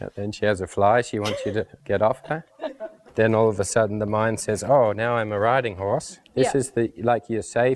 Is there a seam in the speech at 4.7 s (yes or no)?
no